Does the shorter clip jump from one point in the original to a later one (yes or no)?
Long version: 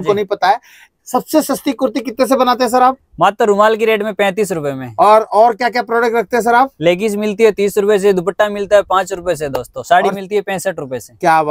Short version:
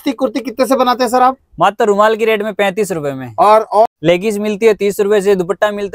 yes